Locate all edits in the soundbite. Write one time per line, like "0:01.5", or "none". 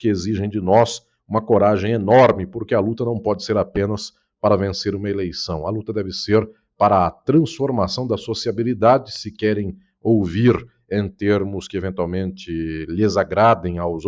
none